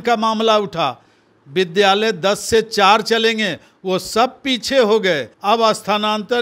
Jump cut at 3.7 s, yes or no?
no